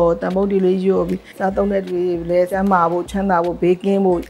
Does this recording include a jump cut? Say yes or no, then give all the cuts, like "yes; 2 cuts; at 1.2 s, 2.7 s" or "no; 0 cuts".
yes; 2 cuts; at 1.2 s, 2.5 s